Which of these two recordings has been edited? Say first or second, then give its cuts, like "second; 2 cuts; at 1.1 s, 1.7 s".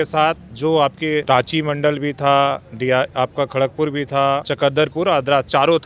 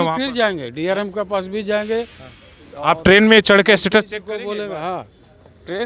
first; 2 cuts; at 1.2 s, 4.5 s